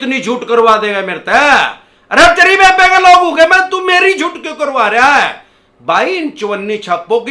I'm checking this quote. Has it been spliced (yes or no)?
no